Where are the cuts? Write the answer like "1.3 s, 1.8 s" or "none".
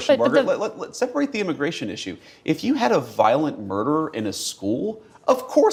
none